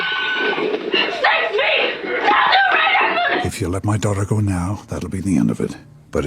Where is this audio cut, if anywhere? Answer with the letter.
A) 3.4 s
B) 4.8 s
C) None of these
A